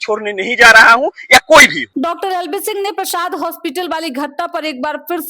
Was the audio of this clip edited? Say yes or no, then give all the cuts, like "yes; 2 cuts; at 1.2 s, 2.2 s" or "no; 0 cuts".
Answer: no; 0 cuts